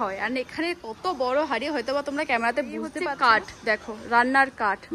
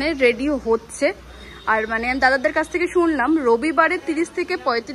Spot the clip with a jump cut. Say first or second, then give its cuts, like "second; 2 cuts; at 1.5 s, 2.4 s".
first; 1 cut; at 3.0 s